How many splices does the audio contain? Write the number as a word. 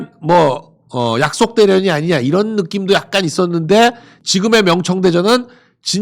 one